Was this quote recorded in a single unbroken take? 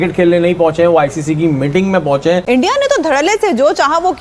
no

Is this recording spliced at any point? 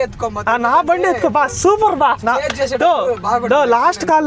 yes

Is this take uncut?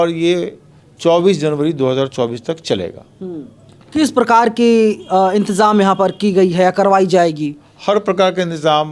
yes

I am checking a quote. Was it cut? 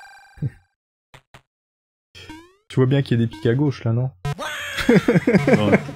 no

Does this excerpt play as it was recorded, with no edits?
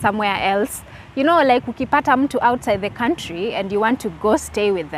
yes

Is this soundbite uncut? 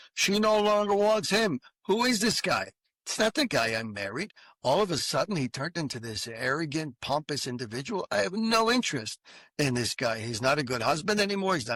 yes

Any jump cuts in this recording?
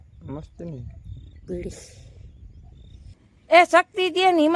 yes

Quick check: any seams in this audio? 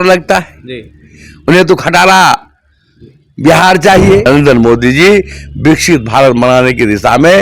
yes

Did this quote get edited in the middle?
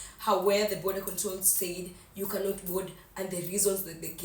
no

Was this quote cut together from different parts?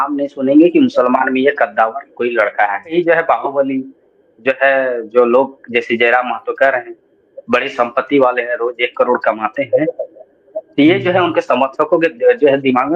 yes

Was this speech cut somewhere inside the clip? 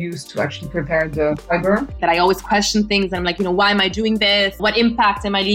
yes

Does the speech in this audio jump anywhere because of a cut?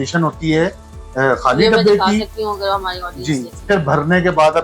yes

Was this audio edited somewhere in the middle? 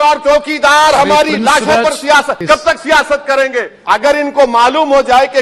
yes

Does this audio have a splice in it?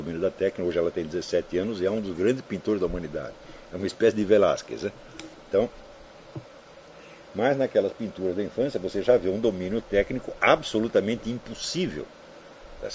no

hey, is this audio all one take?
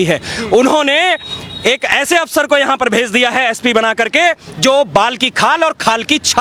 yes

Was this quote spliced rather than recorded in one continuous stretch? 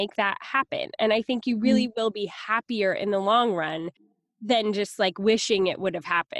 yes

